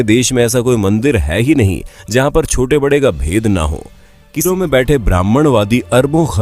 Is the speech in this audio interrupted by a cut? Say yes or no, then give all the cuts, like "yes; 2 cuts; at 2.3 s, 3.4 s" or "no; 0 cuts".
yes; 1 cut; at 4.5 s